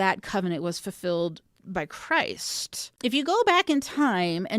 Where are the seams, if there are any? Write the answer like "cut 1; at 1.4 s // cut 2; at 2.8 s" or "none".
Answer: cut 1; at 2.9 s

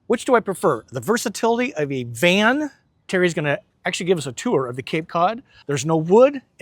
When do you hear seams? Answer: cut 1; at 3.0 s // cut 2; at 5.5 s

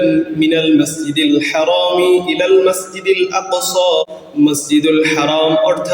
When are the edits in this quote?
cut 1; at 4.1 s

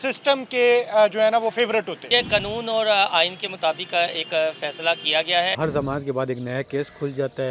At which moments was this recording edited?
cut 1; at 2.1 s // cut 2; at 5.6 s

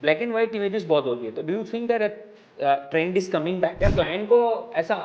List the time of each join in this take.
cut 1; at 3.7 s

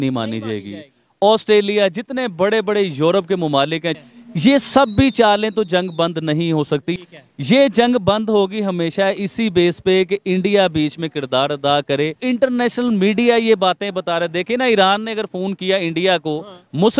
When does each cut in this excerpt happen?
cut 1; at 4.0 s // cut 2; at 7.0 s // cut 3; at 12.2 s

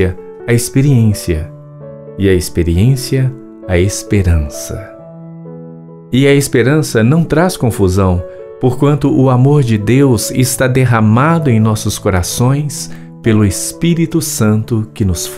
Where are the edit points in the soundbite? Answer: cut 1; at 4.8 s // cut 2; at 6.0 s

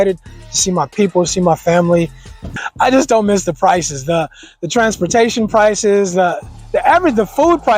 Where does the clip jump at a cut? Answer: cut 1; at 2.4 s

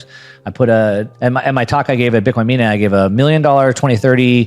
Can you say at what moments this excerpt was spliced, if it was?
cut 1; at 1.1 s

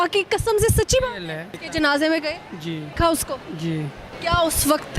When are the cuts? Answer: cut 1; at 1.6 s // cut 2; at 2.9 s // cut 3; at 4.1 s

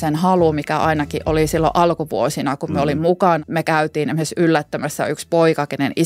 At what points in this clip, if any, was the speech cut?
cut 1; at 3.4 s

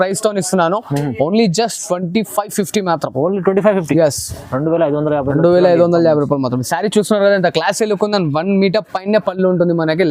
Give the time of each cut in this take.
none

